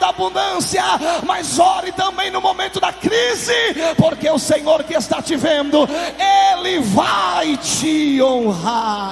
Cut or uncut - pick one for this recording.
uncut